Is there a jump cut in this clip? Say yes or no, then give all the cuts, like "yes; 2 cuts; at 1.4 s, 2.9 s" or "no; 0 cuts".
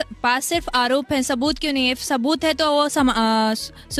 no; 0 cuts